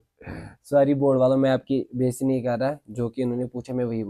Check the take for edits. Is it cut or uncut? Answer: uncut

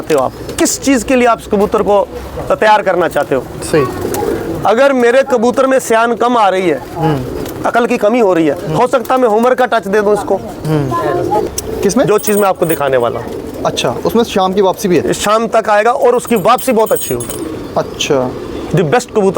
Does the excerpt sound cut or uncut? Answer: cut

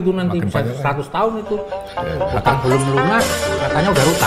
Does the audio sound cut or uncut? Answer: uncut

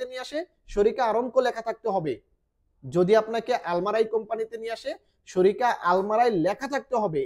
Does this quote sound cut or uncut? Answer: uncut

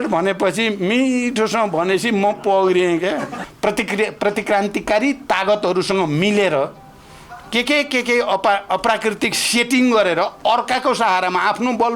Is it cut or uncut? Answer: cut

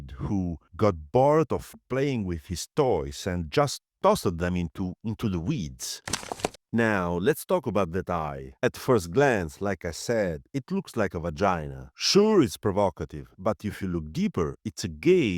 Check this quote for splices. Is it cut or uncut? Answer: cut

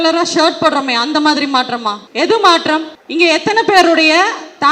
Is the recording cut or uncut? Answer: cut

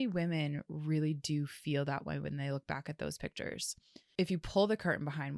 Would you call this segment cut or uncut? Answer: cut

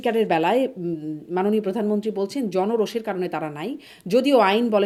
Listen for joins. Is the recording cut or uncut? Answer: uncut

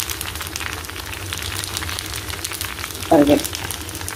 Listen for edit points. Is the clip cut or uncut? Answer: uncut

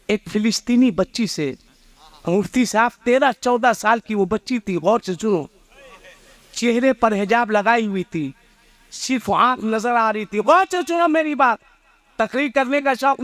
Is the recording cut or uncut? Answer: uncut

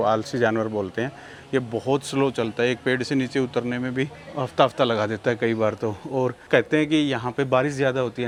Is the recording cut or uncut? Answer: uncut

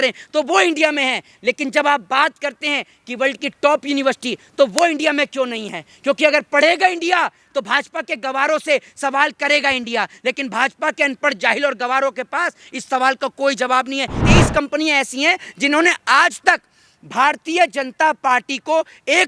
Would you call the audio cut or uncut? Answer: cut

